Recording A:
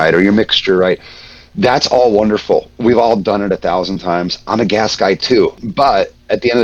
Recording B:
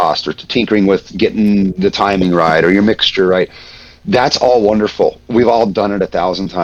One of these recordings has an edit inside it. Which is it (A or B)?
A